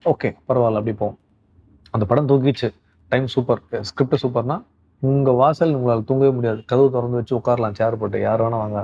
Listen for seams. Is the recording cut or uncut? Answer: uncut